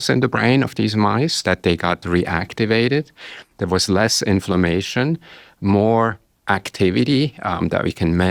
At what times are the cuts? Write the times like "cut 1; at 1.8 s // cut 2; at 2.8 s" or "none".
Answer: none